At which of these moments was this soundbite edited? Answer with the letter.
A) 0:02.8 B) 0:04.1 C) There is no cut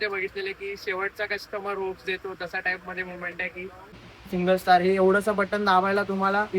B